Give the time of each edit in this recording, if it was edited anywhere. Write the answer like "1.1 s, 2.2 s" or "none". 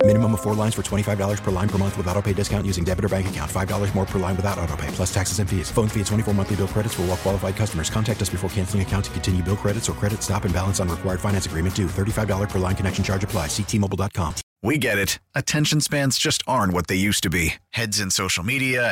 14.4 s